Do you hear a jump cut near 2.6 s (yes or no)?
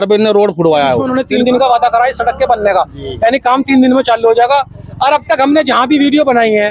no